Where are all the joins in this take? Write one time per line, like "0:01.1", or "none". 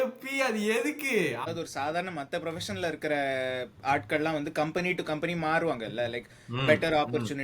0:01.5